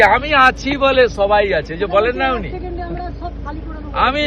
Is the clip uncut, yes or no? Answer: yes